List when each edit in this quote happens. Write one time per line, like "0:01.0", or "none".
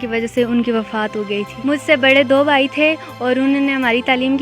0:01.5